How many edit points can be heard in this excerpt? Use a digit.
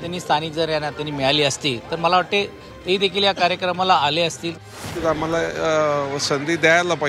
1